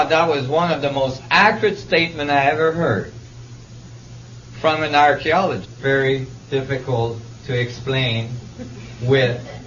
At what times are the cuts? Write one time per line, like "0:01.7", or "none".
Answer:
none